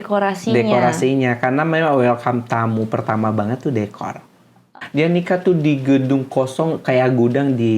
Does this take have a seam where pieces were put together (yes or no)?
yes